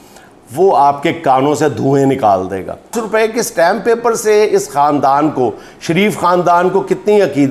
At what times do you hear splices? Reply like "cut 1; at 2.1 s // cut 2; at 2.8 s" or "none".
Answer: cut 1; at 3.0 s